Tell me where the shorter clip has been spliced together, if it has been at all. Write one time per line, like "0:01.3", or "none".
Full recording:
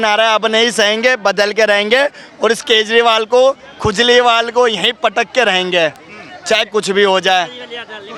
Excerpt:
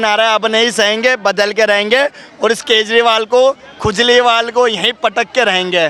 none